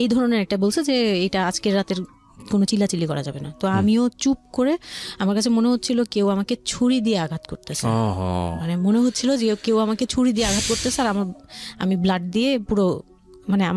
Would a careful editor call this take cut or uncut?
uncut